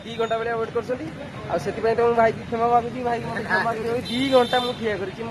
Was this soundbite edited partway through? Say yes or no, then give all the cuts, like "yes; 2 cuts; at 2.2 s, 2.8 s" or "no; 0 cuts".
no; 0 cuts